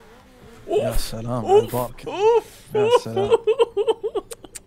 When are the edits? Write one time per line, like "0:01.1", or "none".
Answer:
none